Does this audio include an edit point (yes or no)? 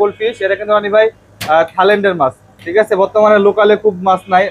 no